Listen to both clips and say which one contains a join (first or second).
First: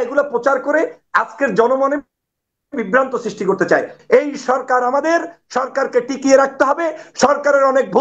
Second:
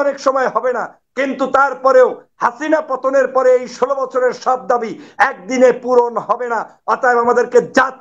first